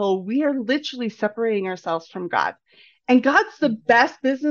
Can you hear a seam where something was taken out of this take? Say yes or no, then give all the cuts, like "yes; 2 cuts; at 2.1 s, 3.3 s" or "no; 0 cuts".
no; 0 cuts